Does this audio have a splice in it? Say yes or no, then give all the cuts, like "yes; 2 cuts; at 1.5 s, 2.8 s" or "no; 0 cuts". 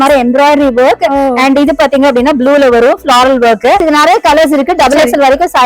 yes; 1 cut; at 3.8 s